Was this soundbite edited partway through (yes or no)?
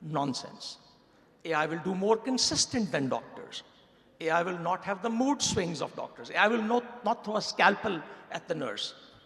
no